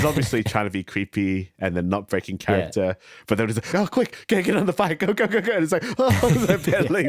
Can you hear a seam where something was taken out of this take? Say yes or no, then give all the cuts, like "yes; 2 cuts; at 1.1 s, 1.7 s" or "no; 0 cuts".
yes; 1 cut; at 3.7 s